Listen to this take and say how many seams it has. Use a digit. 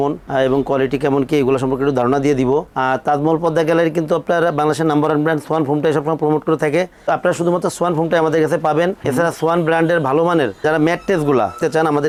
0